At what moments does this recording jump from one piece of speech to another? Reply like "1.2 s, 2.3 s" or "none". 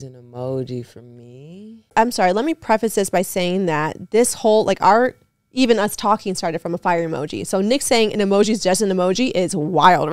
1.9 s